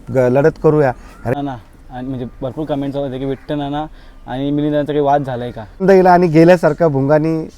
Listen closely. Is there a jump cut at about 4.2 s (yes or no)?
no